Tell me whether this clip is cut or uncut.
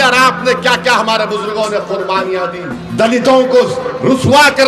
cut